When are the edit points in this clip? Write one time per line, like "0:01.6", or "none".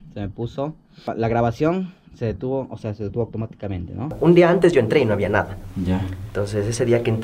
0:01.1
0:04.1